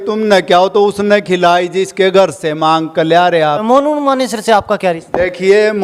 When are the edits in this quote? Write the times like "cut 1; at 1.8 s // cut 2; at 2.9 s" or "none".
cut 1; at 3.6 s